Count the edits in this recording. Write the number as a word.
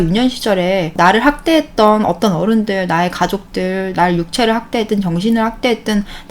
one